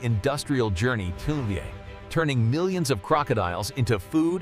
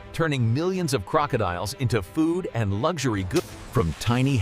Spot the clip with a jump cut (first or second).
second